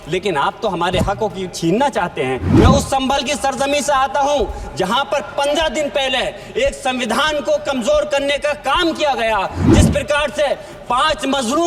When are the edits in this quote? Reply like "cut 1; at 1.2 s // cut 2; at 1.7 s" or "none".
cut 1; at 2.5 s // cut 2; at 9.7 s